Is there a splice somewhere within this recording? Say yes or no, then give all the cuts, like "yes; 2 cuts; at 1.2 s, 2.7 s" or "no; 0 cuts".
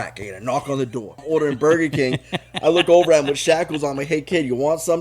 yes; 1 cut; at 1.2 s